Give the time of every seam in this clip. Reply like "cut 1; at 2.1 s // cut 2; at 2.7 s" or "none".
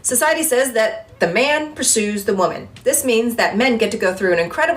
cut 1; at 1.2 s